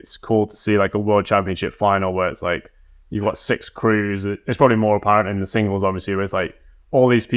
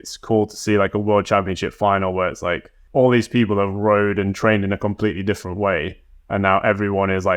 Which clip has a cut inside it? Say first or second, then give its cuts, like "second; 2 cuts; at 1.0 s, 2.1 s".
second; 1 cut; at 2.7 s